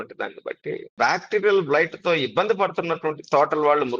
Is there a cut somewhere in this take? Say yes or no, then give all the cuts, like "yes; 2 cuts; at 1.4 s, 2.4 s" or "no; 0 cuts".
yes; 1 cut; at 0.9 s